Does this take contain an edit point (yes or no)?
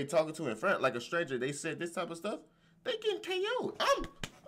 no